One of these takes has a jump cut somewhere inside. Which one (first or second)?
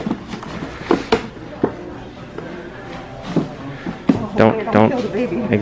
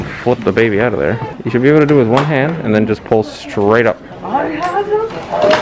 second